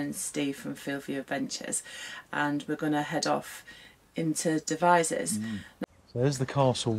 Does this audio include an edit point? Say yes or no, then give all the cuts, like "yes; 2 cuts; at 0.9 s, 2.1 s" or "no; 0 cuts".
yes; 1 cut; at 5.7 s